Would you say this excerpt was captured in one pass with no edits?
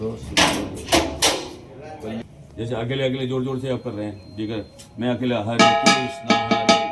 no; 1 cut; at 2.2 s

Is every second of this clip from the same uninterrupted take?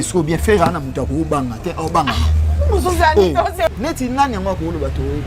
no; 1 cut; at 3.7 s

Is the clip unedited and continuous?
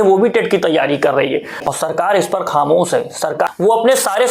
no; 2 cuts; at 1.7 s, 3.5 s

